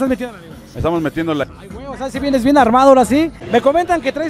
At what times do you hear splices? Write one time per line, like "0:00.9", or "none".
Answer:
0:01.4
0:03.4

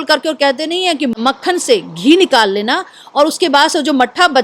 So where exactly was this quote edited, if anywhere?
0:01.1

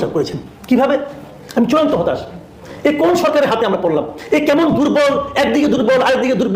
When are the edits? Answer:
0:01.2

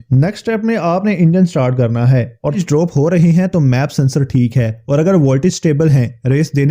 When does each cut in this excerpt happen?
0:02.6

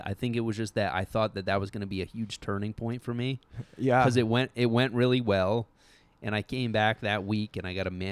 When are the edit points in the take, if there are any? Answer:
none

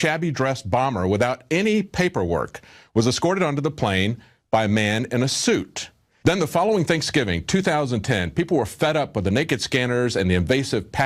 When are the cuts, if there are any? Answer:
0:01.4

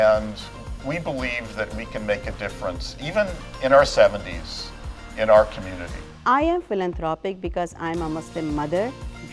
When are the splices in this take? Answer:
0:06.1

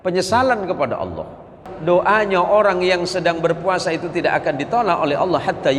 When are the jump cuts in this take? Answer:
0:01.6

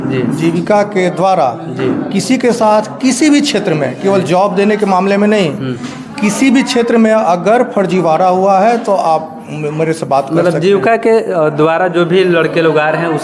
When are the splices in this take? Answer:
none

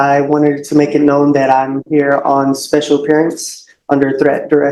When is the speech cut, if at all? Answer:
none

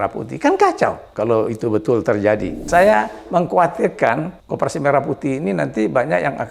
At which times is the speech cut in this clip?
0:01.1
0:02.7
0:04.4

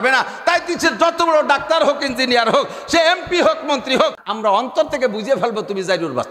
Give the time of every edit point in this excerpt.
0:04.2

